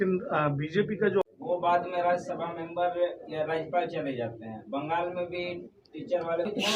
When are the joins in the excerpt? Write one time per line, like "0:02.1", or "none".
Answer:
0:01.3